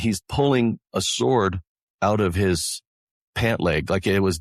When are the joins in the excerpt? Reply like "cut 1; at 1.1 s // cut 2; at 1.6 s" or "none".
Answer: none